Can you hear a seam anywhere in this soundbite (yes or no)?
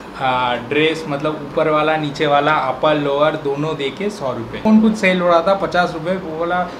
yes